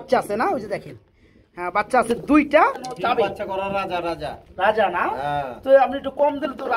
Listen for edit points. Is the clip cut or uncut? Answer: cut